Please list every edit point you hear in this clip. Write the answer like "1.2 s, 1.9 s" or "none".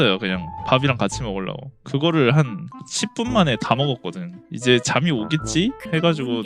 1.7 s, 4.4 s